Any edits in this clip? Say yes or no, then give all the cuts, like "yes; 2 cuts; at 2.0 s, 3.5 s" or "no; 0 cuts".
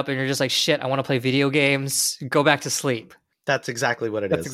no; 0 cuts